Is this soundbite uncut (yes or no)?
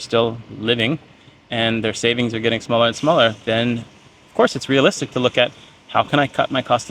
yes